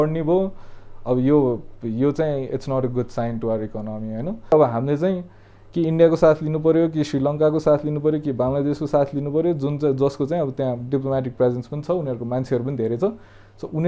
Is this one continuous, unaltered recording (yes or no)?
no